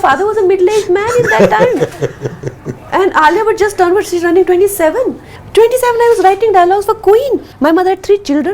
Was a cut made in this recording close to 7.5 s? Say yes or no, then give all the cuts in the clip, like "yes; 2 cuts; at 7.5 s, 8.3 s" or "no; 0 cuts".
yes; 1 cut; at 7.5 s